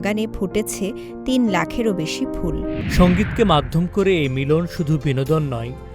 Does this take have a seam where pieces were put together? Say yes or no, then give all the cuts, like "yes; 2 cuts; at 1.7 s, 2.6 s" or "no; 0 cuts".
yes; 1 cut; at 2.8 s